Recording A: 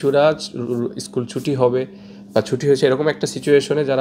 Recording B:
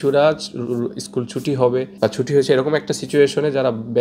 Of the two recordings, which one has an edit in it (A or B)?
B